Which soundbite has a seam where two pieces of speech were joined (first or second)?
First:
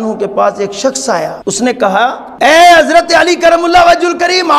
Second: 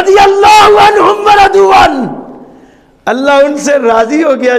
first